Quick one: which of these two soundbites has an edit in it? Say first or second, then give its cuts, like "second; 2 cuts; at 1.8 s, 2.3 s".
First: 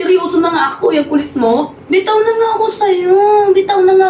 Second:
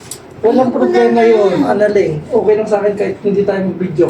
first; 1 cut; at 1.8 s